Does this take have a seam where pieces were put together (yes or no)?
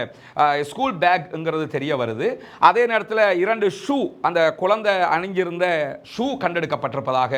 no